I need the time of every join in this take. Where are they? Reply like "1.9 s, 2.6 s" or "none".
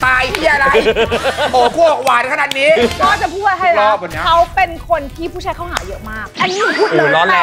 2.9 s, 6.2 s

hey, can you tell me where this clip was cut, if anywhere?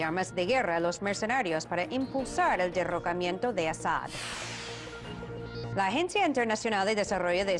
none

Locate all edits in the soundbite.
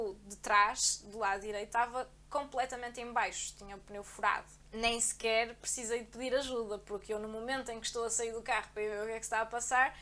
4.6 s

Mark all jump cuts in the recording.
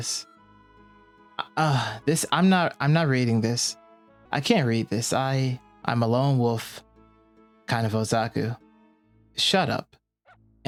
none

